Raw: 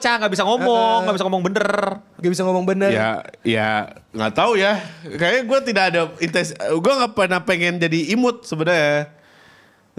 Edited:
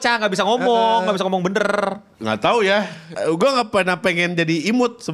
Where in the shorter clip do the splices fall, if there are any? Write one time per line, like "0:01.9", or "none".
0:02.1
0:03.1